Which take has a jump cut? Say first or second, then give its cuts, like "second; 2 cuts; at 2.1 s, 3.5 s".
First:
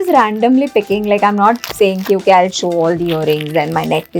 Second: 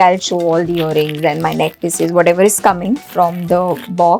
second; 1 cut; at 3.1 s